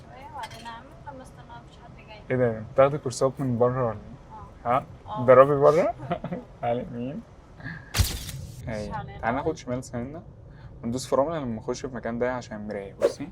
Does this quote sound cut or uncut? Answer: cut